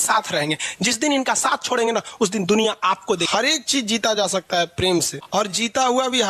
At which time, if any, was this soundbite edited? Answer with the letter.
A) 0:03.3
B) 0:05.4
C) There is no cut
A